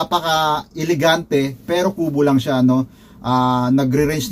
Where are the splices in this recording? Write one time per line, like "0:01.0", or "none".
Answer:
none